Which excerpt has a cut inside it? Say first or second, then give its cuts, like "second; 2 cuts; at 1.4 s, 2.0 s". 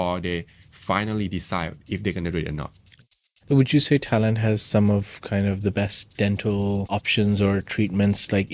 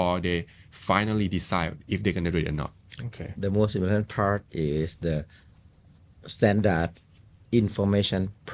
first; 2 cuts; at 3.2 s, 6.9 s